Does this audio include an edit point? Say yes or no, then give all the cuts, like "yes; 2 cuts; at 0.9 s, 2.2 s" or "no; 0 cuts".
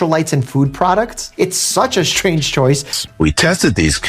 yes; 1 cut; at 2.9 s